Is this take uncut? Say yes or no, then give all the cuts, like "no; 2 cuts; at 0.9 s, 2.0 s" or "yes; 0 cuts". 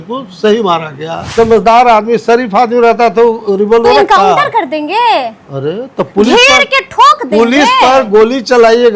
no; 1 cut; at 1.3 s